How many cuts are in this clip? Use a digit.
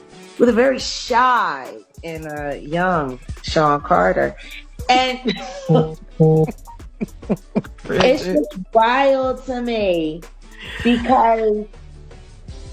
0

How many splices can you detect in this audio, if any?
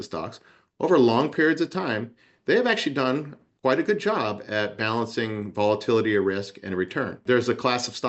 1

